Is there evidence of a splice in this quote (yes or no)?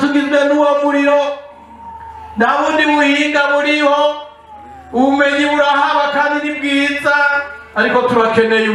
no